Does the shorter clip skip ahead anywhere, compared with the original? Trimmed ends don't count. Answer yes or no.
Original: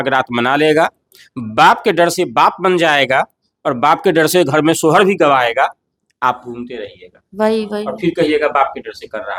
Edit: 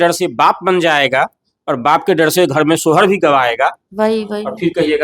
yes